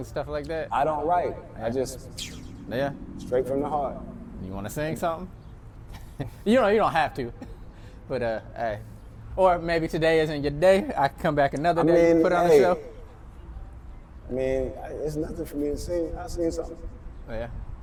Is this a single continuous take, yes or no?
yes